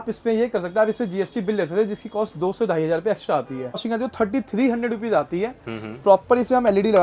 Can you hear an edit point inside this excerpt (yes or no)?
yes